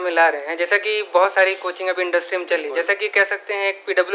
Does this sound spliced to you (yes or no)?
no